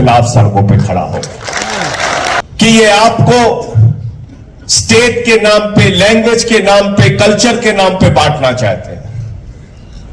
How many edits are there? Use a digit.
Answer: 1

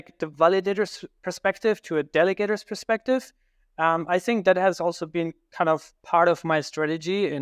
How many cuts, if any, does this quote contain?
0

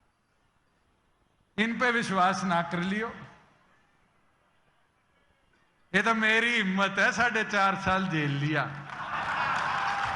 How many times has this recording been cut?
0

